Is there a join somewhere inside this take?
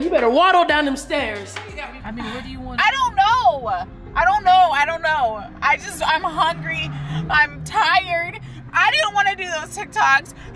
yes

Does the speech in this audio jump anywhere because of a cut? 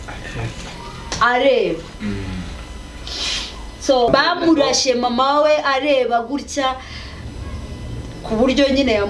yes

